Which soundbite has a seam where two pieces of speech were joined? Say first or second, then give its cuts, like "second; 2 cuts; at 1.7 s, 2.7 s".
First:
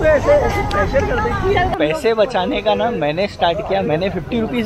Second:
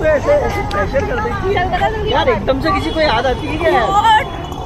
first; 1 cut; at 1.7 s